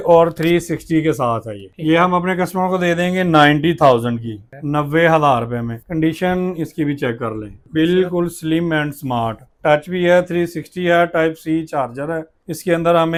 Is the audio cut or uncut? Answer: uncut